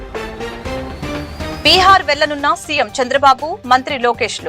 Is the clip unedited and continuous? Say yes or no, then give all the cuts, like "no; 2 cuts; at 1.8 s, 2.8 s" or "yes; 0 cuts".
no; 1 cut; at 1.7 s